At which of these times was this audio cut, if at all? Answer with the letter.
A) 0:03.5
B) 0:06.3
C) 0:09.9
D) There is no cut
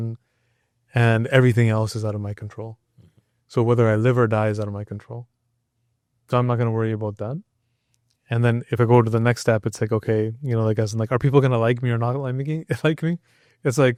D